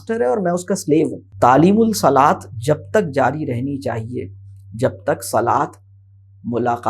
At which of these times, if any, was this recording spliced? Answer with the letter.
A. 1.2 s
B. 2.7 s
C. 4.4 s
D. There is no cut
A